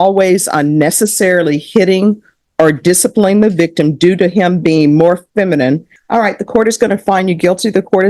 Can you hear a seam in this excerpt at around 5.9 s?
yes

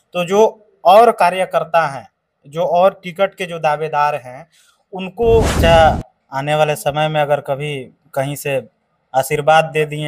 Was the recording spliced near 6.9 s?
no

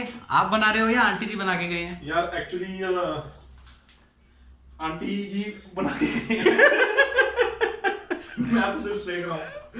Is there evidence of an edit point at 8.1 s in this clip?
no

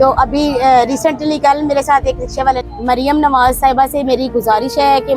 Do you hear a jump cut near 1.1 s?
no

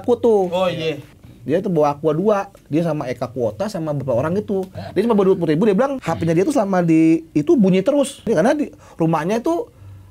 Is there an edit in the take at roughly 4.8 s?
yes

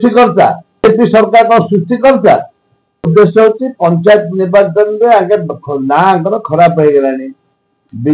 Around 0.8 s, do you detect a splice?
yes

